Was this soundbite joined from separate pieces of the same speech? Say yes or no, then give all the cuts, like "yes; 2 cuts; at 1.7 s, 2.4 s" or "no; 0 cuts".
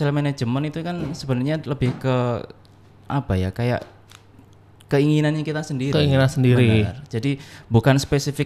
no; 0 cuts